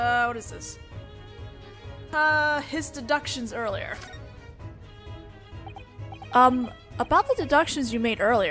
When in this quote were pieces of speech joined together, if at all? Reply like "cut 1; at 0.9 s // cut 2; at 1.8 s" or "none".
cut 1; at 0.9 s

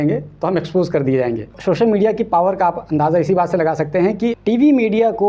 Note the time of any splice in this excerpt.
cut 1; at 1.6 s // cut 2; at 4.4 s

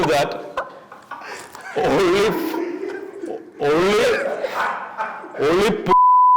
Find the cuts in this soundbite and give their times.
none

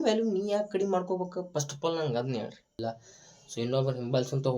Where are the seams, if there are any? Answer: cut 1; at 2.8 s

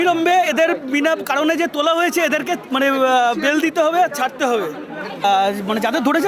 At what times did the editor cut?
cut 1; at 5.2 s

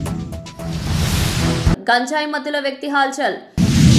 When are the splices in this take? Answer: cut 1; at 1.7 s

